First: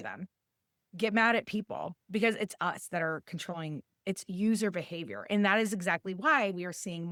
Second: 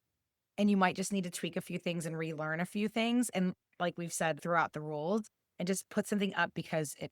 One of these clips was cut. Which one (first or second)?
second